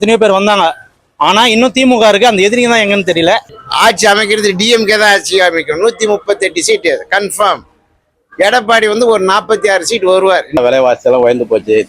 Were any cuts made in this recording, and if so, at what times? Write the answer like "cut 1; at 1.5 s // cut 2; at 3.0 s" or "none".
cut 1; at 3.6 s // cut 2; at 10.6 s